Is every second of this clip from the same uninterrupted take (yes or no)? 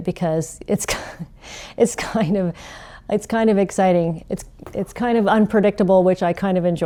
yes